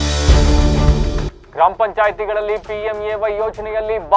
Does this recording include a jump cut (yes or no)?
no